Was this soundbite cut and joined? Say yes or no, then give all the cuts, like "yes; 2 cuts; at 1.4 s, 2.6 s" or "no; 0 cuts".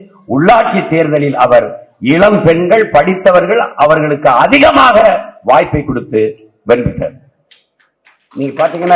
no; 0 cuts